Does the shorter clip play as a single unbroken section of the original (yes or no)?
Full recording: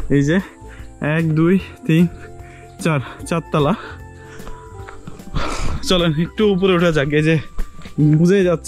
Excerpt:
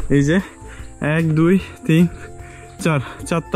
yes